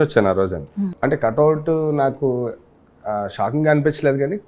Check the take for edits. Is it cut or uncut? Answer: cut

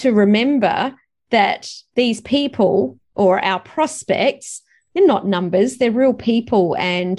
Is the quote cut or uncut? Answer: uncut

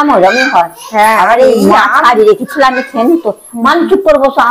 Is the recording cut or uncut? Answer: uncut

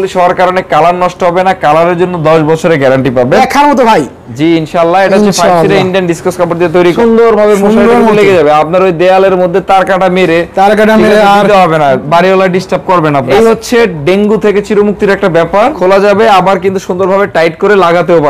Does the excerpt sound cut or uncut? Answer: cut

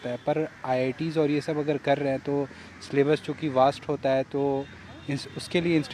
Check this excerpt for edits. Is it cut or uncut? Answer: uncut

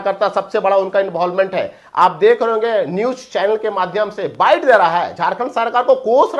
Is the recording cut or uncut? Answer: uncut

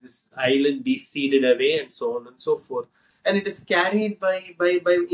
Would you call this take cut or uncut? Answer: cut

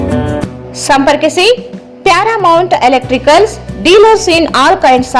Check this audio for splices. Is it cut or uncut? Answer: uncut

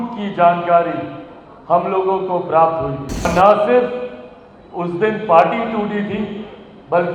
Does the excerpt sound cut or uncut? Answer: cut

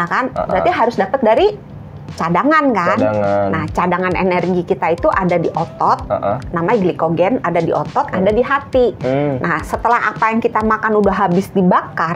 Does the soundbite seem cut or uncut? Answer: uncut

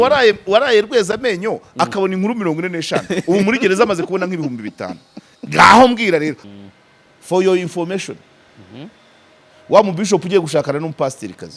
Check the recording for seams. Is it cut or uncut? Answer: cut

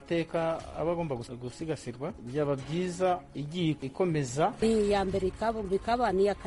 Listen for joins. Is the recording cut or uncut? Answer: cut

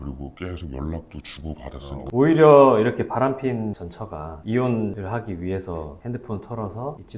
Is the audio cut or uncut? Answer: cut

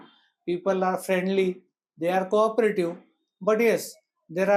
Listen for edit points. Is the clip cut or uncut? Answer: uncut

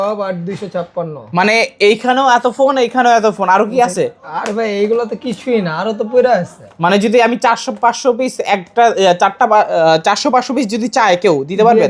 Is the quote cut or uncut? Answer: uncut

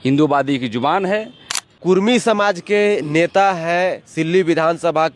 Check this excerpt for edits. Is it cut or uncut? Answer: cut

